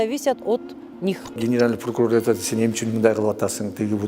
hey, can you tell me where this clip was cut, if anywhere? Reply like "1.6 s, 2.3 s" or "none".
1.3 s